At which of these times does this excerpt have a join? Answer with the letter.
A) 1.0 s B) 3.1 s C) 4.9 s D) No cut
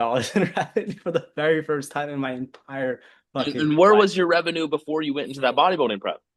D